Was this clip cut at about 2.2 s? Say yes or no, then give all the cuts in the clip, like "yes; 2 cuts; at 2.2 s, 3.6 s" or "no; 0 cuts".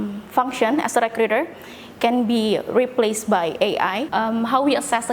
no; 1 cut; at 4.1 s